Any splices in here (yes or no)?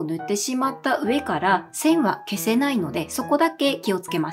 no